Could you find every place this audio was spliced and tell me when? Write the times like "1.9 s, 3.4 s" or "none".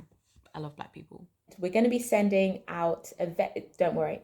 1.5 s